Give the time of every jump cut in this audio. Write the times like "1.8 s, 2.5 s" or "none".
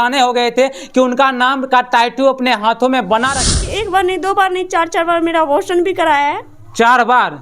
3.5 s

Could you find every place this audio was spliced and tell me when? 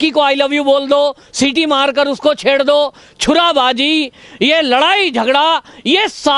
none

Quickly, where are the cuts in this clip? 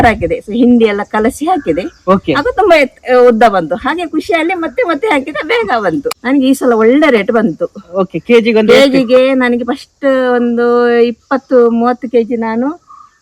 6.1 s

